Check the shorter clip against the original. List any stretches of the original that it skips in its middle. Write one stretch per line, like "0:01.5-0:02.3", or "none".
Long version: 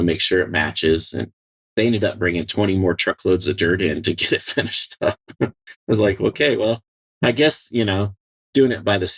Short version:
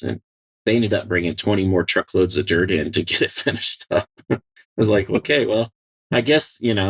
none